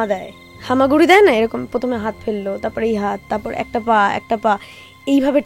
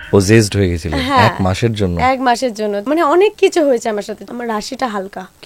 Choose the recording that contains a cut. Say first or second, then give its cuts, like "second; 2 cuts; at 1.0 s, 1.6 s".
second; 2 cuts; at 2.8 s, 4.2 s